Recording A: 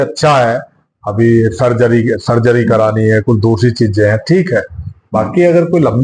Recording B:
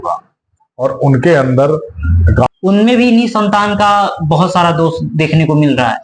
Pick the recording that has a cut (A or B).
B